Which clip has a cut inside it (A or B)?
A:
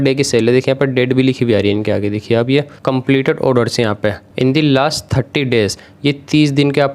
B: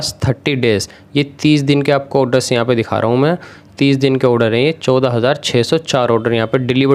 A